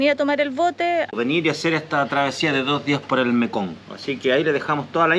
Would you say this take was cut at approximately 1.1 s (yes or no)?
yes